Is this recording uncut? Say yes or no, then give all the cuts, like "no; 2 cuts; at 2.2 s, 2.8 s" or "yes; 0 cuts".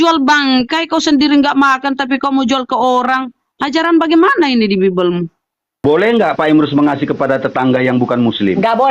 no; 1 cut; at 5.8 s